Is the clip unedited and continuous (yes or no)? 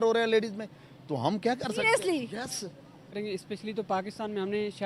no